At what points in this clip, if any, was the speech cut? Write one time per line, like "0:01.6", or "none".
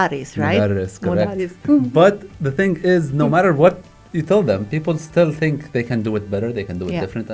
0:01.6